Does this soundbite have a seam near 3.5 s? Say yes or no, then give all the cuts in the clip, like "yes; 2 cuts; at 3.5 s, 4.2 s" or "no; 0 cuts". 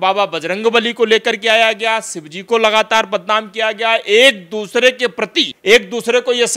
no; 1 cut; at 5.5 s